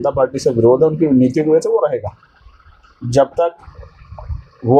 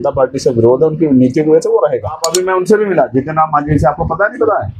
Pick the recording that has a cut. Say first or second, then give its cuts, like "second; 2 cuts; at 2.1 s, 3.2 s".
second; 1 cut; at 2.3 s